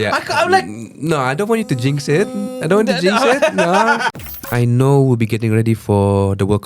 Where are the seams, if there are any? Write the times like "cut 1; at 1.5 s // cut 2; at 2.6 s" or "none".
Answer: cut 1; at 4.1 s

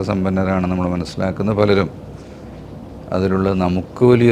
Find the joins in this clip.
none

